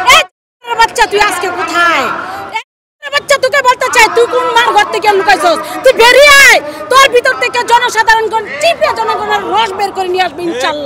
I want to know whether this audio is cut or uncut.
uncut